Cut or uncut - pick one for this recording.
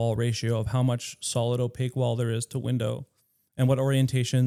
uncut